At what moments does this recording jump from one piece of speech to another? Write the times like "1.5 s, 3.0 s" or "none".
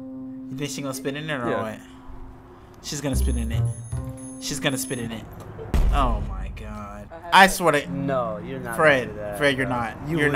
7.1 s